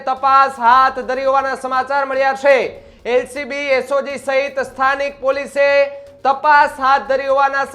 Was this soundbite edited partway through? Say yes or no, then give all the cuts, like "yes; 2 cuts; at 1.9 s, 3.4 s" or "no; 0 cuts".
no; 0 cuts